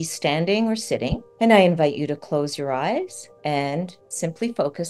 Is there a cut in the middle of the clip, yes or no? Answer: yes